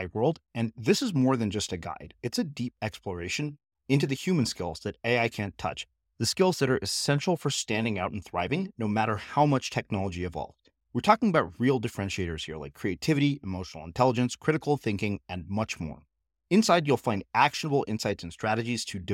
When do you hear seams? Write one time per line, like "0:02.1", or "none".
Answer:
none